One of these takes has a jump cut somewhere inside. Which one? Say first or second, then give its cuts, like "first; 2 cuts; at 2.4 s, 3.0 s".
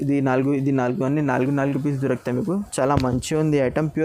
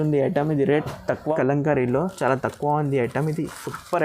second; 1 cut; at 1.2 s